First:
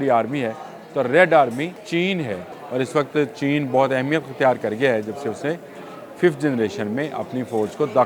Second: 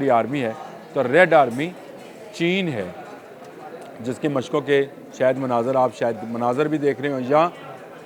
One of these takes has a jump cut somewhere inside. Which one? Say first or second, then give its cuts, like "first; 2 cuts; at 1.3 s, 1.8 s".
first; 2 cuts; at 1.8 s, 2.5 s